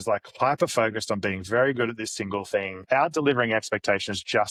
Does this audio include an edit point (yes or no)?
no